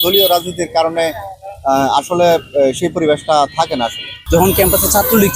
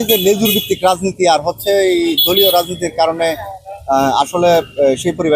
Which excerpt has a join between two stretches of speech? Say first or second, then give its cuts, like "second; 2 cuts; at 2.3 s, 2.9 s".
first; 1 cut; at 4.1 s